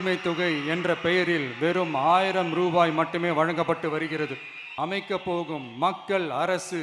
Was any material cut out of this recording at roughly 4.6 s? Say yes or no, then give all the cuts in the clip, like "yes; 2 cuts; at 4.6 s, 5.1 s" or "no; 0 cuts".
yes; 1 cut; at 4.6 s